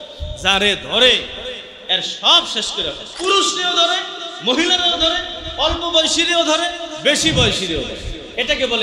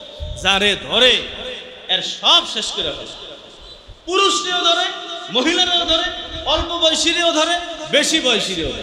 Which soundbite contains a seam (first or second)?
first